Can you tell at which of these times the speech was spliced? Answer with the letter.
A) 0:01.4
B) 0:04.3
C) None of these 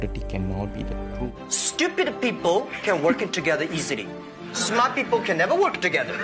A